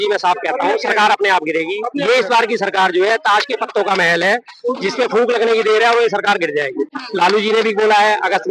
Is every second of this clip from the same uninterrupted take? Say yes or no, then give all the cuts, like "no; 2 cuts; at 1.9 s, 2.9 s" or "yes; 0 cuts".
yes; 0 cuts